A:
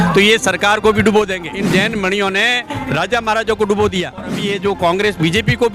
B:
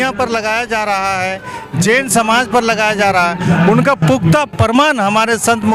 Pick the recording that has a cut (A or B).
A